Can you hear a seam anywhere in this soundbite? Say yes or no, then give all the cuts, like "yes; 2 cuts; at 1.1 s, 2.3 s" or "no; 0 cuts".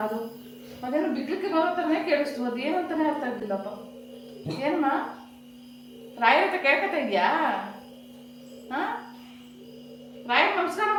no; 0 cuts